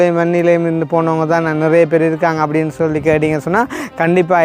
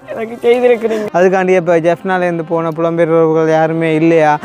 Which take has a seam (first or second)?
second